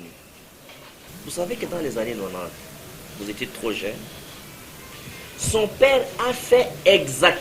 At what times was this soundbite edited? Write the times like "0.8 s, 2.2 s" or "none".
1.1 s